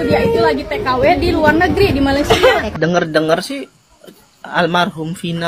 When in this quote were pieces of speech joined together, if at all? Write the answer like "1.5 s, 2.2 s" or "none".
2.7 s

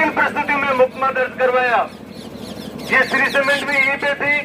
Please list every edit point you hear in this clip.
none

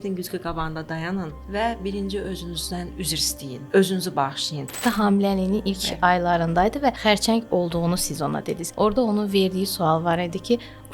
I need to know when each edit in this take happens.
1.4 s, 3.0 s, 4.8 s, 7.0 s, 8.6 s

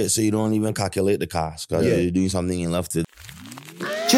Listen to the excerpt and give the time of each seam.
3.1 s

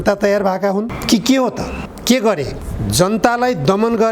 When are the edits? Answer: 1.0 s, 1.9 s, 2.7 s

